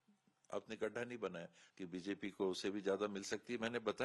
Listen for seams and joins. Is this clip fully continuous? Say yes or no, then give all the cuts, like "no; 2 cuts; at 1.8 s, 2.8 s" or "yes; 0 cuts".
no; 1 cut; at 1.6 s